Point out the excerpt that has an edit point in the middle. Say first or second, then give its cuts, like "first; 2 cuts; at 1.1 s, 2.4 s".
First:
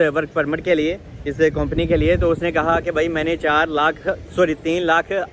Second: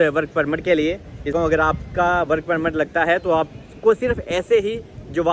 second; 1 cut; at 1.3 s